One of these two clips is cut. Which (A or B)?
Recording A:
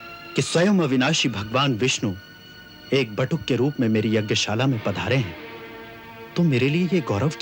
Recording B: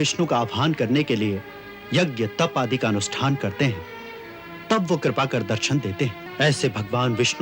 B